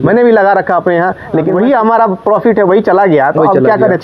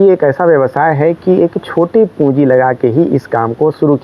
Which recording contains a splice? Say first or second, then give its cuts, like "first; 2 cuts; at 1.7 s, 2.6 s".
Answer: first; 1 cut; at 1.5 s